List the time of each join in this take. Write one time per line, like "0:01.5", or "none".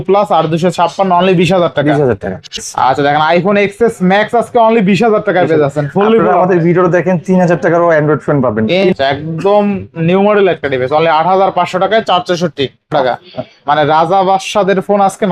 0:02.5
0:08.9
0:12.9

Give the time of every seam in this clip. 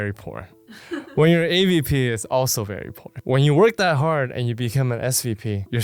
none

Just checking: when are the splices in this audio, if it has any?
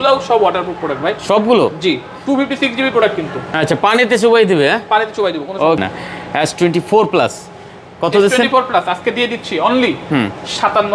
0:05.8

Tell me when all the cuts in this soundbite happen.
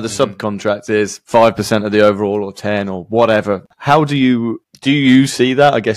0:03.7

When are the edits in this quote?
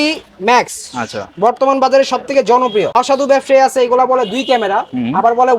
0:02.9

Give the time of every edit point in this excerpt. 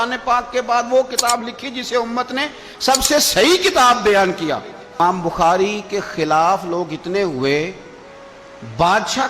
0:05.0

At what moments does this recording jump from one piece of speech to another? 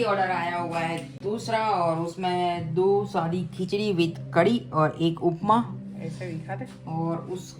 none

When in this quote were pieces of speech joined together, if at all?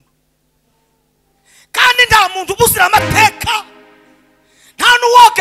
none

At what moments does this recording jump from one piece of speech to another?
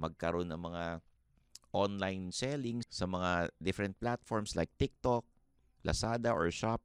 0:02.8

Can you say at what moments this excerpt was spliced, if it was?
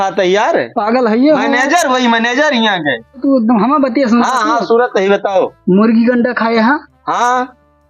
0:03.2

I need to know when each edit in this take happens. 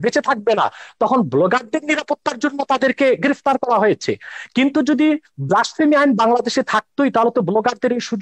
none

